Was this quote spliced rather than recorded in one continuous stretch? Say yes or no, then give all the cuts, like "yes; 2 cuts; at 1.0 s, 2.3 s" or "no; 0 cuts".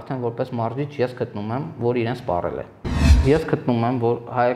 yes; 1 cut; at 3.0 s